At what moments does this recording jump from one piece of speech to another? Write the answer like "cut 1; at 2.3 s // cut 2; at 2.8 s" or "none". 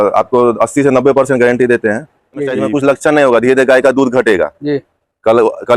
cut 1; at 2.6 s